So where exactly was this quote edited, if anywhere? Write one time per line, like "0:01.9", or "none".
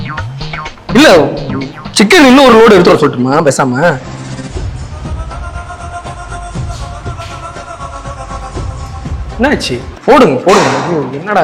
none